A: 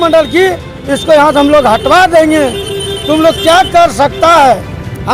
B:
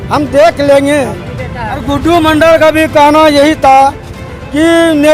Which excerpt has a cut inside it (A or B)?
B